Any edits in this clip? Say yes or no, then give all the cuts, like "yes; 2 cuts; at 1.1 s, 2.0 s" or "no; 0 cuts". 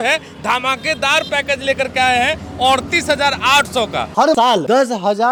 no; 0 cuts